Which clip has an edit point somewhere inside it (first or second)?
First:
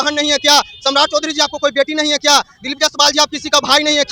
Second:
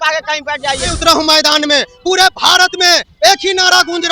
second